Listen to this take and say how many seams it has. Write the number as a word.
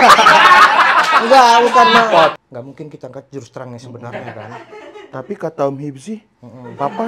one